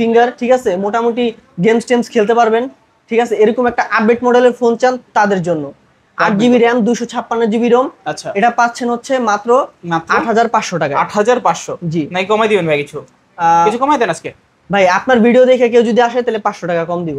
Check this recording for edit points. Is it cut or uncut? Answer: uncut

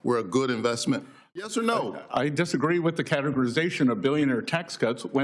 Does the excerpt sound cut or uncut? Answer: cut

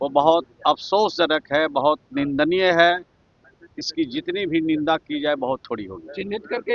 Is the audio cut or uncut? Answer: uncut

